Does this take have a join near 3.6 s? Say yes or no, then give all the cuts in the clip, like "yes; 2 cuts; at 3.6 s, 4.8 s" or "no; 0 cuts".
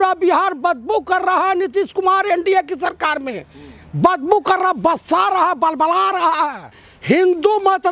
no; 1 cut; at 6.9 s